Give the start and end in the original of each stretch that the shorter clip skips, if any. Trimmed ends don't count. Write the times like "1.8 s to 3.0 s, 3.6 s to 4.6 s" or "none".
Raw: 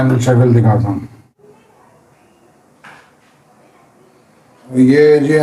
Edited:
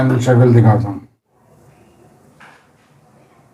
1.0 s to 1.4 s